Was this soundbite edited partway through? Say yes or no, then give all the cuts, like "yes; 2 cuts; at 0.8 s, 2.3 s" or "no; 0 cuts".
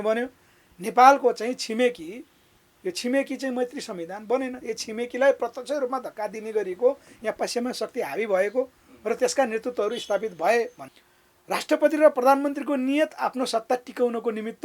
yes; 1 cut; at 10.8 s